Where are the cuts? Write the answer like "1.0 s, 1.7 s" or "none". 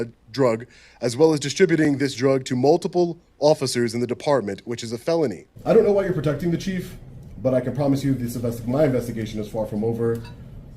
5.5 s